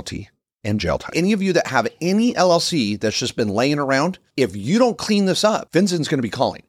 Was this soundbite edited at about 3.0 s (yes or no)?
no